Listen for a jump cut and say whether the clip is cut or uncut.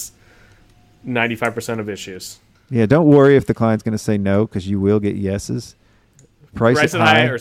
uncut